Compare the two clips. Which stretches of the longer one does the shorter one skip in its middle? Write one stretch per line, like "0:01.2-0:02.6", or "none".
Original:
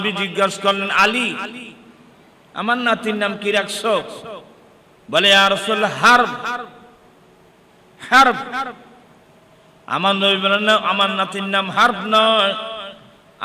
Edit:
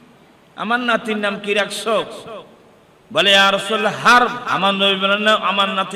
0:06.4-0:09.9